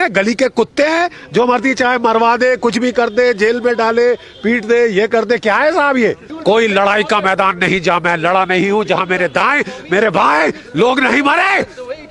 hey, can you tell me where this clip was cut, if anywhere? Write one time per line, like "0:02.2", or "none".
0:06.3